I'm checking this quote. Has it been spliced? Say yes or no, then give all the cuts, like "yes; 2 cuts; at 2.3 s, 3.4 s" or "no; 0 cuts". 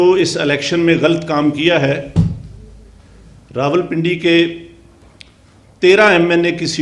no; 0 cuts